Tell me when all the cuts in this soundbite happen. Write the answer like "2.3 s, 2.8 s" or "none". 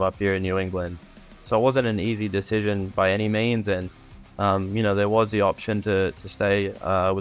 1.0 s